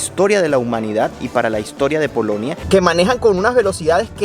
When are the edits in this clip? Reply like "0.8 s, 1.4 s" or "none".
2.6 s